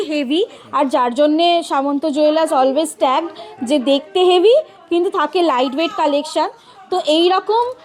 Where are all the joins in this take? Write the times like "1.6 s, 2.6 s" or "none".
none